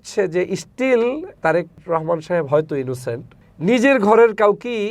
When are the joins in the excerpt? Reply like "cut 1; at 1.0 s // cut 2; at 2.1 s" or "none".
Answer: cut 1; at 1.4 s // cut 2; at 3.3 s